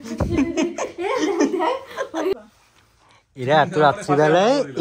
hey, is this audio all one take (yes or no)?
no